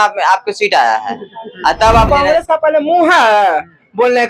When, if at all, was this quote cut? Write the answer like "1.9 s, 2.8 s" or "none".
2.1 s